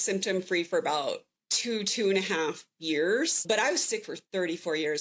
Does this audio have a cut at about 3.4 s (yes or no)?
yes